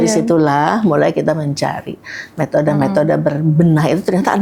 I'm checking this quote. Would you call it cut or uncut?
uncut